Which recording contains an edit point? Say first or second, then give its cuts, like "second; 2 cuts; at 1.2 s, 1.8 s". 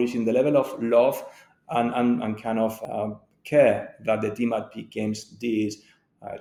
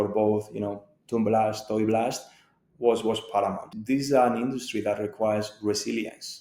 second; 1 cut; at 3.7 s